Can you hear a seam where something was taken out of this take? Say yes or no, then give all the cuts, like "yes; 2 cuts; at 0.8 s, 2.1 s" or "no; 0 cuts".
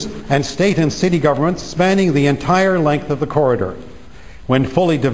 yes; 1 cut; at 4.1 s